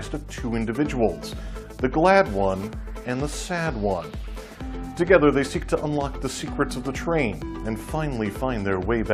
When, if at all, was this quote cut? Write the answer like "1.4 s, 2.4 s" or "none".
6.7 s